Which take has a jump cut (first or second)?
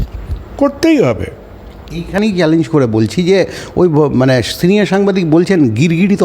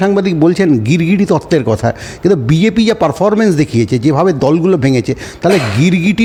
first